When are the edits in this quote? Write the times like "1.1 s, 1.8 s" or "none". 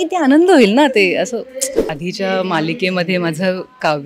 1.9 s